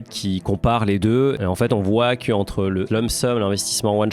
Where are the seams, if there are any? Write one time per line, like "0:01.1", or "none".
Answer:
0:02.9